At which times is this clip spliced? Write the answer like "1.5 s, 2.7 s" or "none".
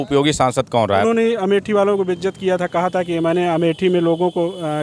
1.0 s